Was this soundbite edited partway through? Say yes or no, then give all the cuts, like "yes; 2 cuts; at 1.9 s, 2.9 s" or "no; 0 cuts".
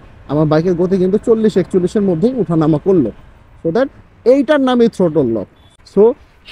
yes; 1 cut; at 5.6 s